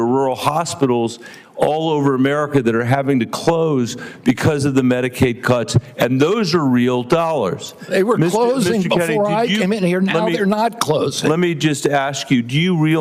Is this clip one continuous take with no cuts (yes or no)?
yes